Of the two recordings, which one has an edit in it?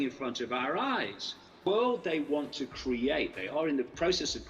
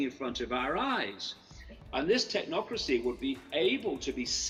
first; 1 cut; at 1.7 s

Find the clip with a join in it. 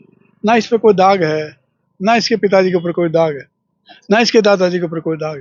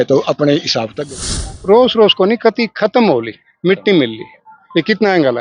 second; 1 cut; at 1.2 s

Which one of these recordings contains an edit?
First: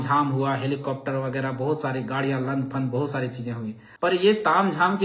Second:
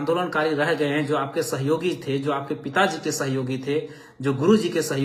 first; 1 cut; at 4.1 s

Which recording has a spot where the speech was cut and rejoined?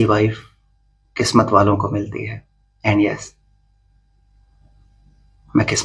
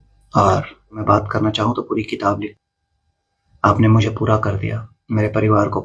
second; 2 cuts; at 1.0 s, 2.5 s

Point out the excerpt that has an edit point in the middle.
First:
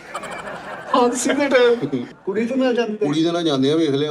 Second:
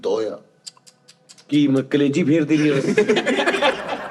first; 1 cut; at 2.1 s

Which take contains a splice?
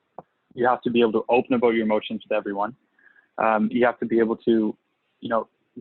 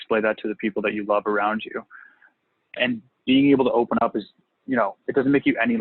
second; 1 cut; at 2.2 s

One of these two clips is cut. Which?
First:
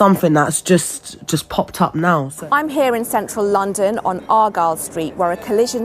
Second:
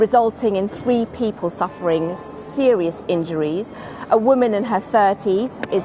first; 1 cut; at 2.3 s

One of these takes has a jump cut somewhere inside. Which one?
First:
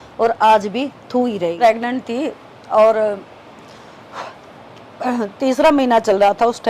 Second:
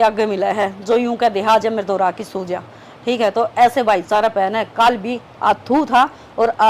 first; 1 cut; at 1.6 s

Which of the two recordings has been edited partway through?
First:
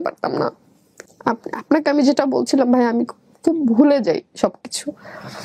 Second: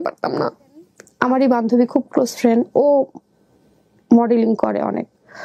second; 1 cut; at 1.0 s

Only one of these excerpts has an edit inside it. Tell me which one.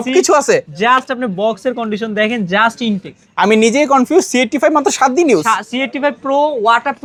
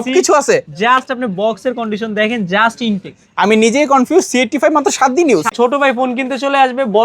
second; 1 cut; at 5.5 s

